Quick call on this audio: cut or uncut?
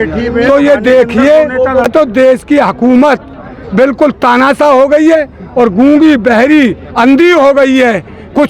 cut